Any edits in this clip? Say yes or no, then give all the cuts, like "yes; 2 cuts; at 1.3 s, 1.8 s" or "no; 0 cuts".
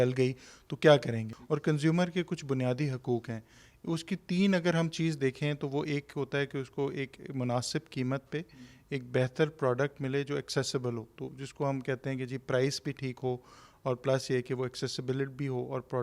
yes; 1 cut; at 1.3 s